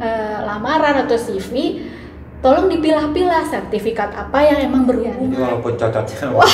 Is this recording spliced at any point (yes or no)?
yes